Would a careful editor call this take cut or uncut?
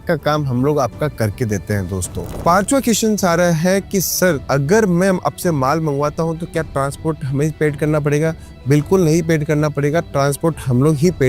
cut